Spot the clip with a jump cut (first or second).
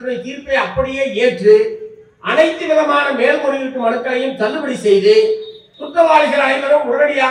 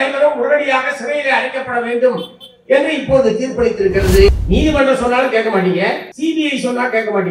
second